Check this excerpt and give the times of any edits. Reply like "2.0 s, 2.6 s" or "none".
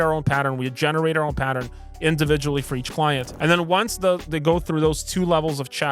none